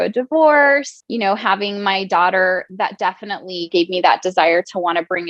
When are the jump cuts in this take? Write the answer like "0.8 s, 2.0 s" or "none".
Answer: 1.0 s, 3.7 s